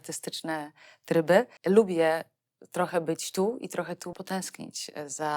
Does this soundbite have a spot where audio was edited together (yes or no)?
yes